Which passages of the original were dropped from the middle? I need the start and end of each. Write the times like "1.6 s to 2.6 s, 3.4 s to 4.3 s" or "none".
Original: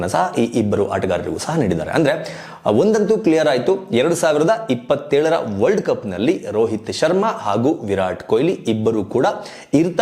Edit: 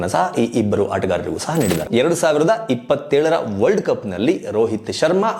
1.8 s to 3.8 s